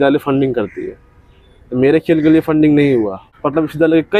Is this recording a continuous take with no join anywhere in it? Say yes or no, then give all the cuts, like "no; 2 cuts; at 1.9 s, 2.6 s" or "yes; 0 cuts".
no; 1 cut; at 3.2 s